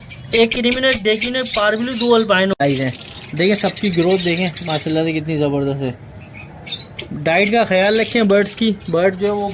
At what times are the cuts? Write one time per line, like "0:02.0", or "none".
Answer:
0:02.6